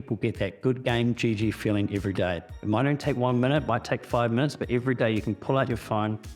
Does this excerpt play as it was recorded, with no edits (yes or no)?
yes